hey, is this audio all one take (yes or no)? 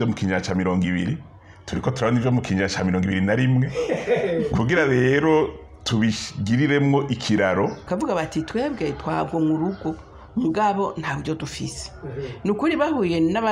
no